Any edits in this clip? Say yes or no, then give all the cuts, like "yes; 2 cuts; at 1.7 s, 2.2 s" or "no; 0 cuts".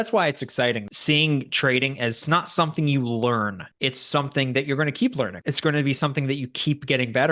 yes; 4 cuts; at 0.9 s, 2.2 s, 3.6 s, 5.4 s